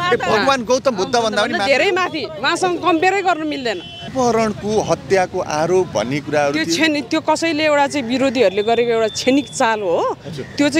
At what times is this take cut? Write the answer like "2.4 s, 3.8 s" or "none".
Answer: 4.1 s

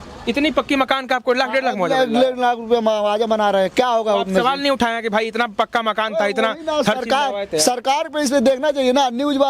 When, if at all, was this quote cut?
none

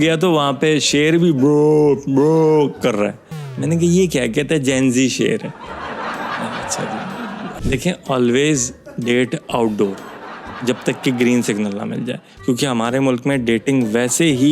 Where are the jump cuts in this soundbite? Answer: 7.5 s

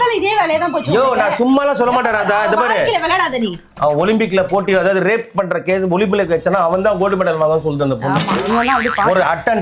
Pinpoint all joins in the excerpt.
3.7 s

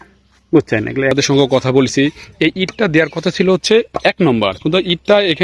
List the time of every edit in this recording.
1.1 s

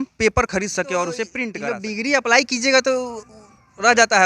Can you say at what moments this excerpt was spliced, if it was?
1.5 s

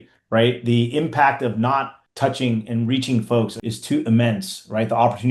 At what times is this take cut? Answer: 2.0 s, 3.7 s

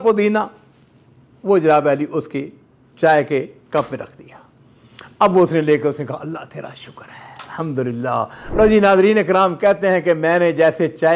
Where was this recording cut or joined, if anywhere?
8.4 s

